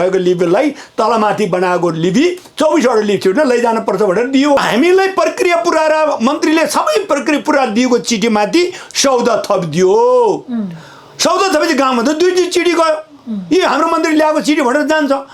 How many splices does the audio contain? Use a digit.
1